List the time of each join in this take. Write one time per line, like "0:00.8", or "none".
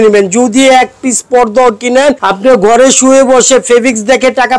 0:02.3

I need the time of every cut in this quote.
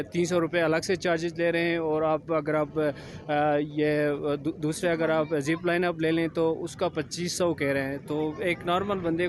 none

